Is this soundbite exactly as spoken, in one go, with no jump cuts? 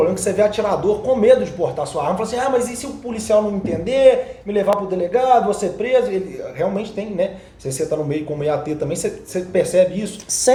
yes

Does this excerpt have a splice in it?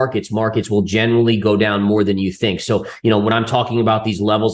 no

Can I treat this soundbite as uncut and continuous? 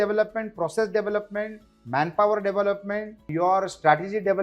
no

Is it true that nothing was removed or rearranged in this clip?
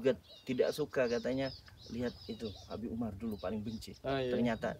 yes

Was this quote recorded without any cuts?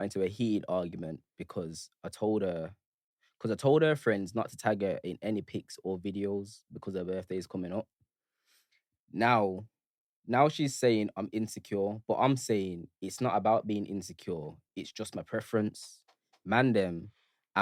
yes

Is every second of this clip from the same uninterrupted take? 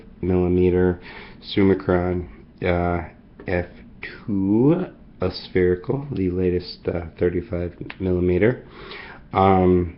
yes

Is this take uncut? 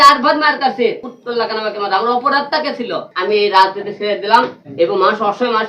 no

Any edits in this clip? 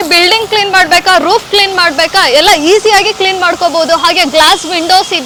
no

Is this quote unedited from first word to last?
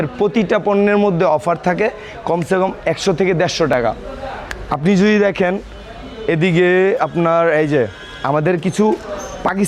yes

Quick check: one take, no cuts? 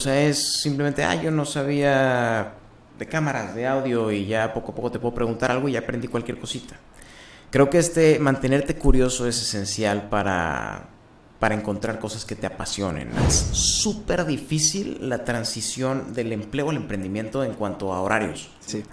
no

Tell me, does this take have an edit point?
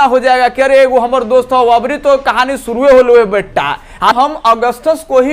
yes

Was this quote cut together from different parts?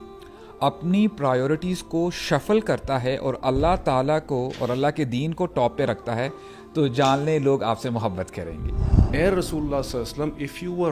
yes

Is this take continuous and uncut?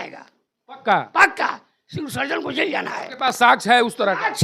yes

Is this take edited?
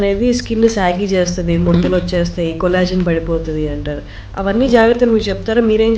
no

